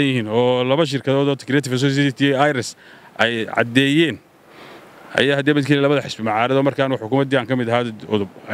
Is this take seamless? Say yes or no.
yes